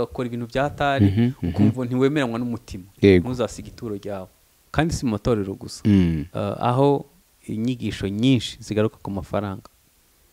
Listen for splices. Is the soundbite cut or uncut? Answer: cut